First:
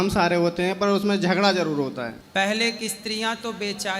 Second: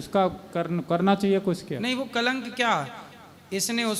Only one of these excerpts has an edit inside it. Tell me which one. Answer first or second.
first